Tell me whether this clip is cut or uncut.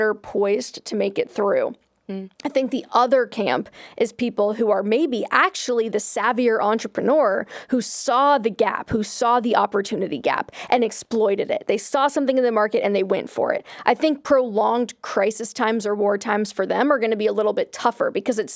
uncut